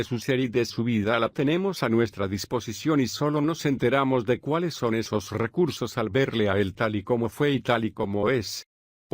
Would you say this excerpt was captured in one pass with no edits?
no; 1 cut; at 1.5 s

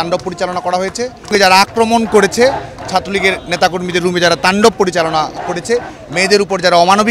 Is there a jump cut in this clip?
yes; 1 cut; at 1.3 s

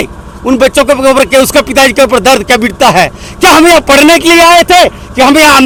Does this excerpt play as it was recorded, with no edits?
yes; 0 cuts

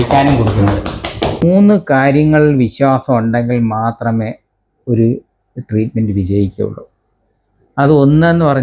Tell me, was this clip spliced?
yes; 1 cut; at 1.4 s

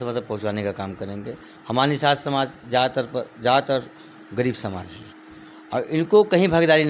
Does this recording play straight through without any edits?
yes; 0 cuts

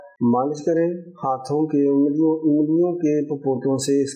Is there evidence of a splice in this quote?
no; 0 cuts

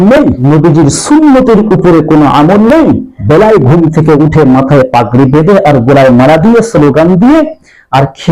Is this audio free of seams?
yes; 0 cuts

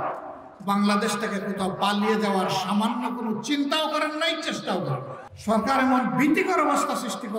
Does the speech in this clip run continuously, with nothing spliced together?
no; 1 cut; at 5.2 s

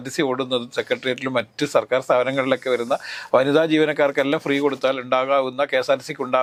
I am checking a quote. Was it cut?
no; 0 cuts

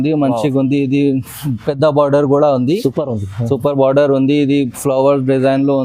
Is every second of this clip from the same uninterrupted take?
yes; 0 cuts

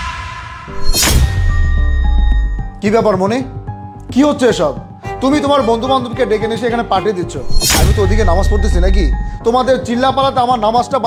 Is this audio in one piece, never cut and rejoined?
yes; 0 cuts

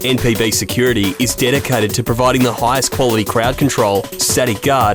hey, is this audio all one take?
yes; 0 cuts

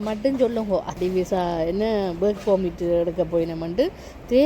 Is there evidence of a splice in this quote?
yes; 1 cut; at 0.9 s

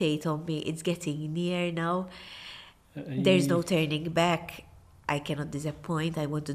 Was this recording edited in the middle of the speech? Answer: no; 0 cuts

